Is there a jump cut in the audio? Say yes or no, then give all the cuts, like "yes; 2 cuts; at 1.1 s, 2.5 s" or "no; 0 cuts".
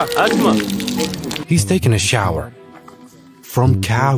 yes; 1 cut; at 1.4 s